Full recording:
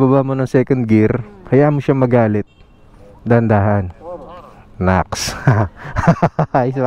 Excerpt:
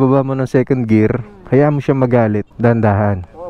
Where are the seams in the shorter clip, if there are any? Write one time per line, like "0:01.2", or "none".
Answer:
0:02.5